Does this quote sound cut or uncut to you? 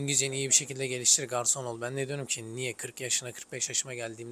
uncut